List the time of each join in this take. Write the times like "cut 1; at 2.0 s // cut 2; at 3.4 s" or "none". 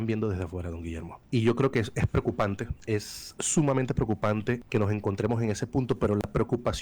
cut 1; at 1.1 s // cut 2; at 2.7 s // cut 3; at 4.6 s